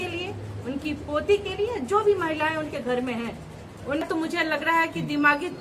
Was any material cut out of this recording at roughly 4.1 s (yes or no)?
yes